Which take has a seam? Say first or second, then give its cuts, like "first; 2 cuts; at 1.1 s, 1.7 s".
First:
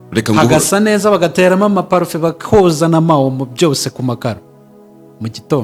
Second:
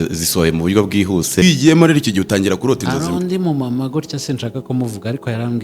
second; 1 cut; at 1.4 s